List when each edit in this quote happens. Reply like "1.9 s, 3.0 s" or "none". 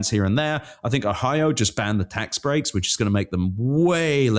none